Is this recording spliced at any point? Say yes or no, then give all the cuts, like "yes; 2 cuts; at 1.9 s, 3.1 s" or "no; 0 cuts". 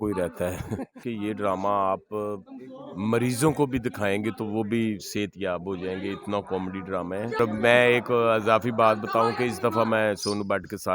yes; 2 cuts; at 1.0 s, 7.4 s